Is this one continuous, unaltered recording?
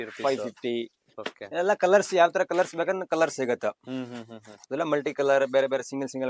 yes; 0 cuts

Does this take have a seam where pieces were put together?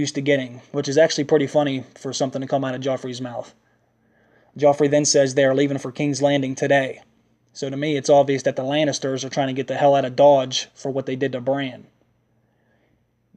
yes; 1 cut; at 11.1 s

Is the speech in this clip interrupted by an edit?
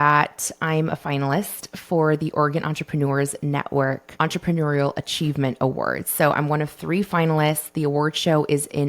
yes; 1 cut; at 4.1 s

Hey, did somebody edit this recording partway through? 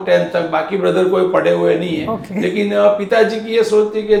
no; 0 cuts

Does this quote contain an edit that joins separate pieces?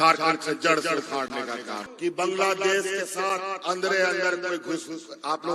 yes; 1 cut; at 1.9 s

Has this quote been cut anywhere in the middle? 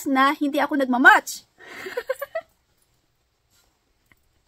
no; 0 cuts

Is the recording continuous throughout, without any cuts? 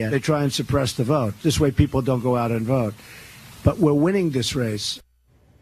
yes; 0 cuts

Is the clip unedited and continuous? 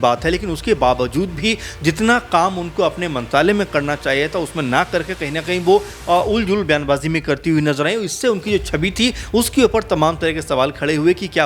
yes; 0 cuts

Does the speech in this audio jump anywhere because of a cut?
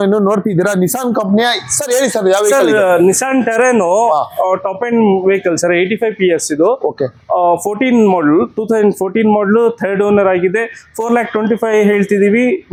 no; 0 cuts

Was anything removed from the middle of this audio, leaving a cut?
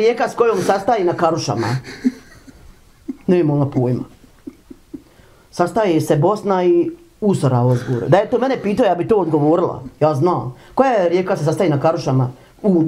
no; 0 cuts

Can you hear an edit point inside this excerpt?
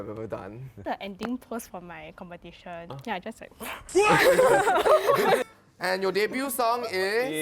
yes; 3 cuts; at 0.9 s, 2.9 s, 5.4 s

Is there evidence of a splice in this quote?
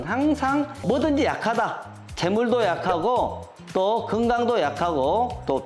no; 0 cuts

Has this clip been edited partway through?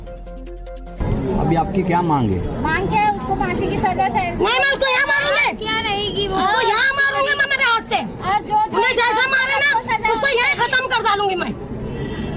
no; 0 cuts

